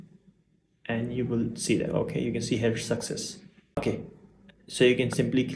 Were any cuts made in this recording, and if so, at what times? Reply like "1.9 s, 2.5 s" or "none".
3.8 s